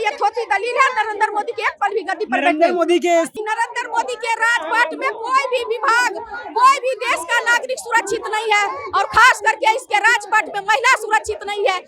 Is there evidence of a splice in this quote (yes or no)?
yes